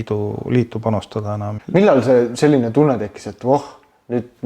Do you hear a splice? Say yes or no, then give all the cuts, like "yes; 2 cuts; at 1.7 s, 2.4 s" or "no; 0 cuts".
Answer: yes; 1 cut; at 1.5 s